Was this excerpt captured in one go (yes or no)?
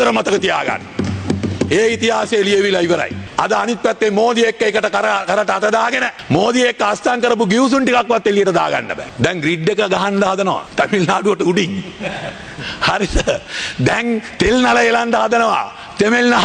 no